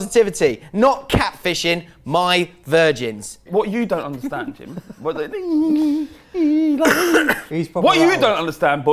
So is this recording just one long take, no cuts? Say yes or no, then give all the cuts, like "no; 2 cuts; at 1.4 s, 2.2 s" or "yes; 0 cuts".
no; 1 cut; at 3.5 s